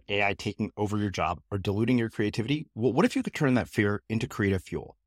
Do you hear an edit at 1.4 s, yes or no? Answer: no